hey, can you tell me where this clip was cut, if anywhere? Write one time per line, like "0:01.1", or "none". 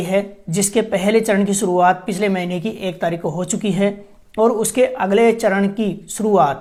none